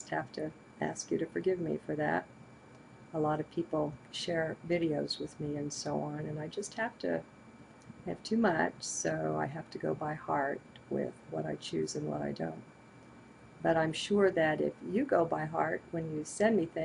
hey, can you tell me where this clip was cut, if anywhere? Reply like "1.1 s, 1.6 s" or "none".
6.2 s